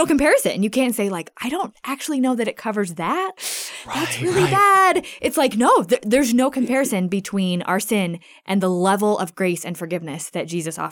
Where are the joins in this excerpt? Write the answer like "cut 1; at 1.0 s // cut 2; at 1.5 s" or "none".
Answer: cut 1; at 3.4 s